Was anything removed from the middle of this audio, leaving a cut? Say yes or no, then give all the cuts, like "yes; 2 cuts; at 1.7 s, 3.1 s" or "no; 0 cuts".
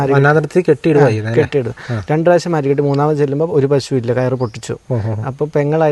no; 0 cuts